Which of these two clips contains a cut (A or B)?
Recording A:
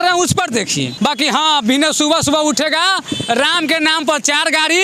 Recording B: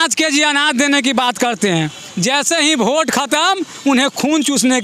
A